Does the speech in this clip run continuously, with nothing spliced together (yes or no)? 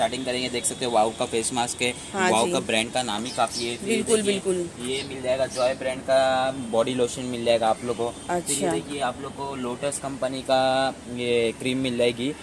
yes